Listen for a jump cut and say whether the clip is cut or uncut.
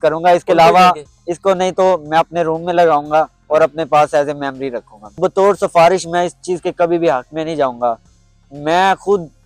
cut